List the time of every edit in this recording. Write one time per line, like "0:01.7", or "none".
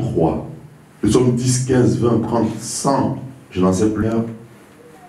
none